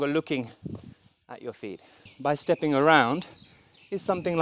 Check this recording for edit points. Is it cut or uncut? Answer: cut